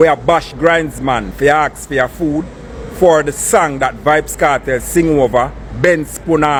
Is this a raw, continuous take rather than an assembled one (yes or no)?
yes